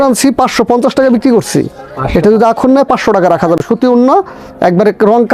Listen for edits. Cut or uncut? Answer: uncut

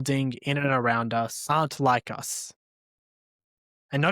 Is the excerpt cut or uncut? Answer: cut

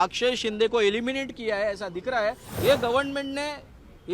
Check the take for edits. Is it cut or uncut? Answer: cut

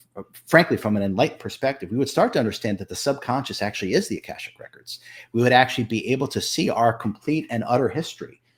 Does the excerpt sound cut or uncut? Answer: uncut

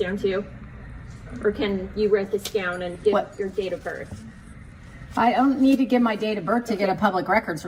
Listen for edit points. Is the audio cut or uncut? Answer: uncut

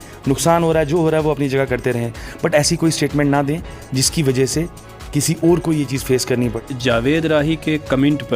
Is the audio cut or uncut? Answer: cut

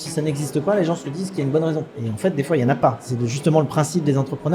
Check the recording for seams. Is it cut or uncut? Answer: cut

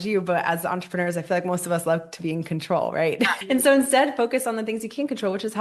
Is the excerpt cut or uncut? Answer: cut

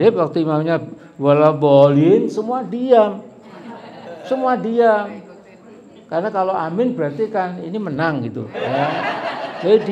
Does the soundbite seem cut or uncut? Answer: uncut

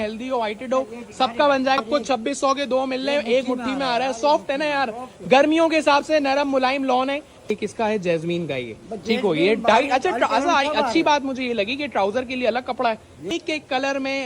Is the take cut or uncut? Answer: cut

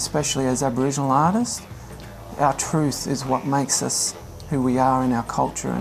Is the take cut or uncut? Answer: uncut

